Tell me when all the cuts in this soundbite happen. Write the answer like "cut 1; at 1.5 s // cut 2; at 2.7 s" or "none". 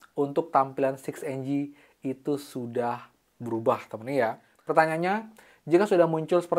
cut 1; at 4.5 s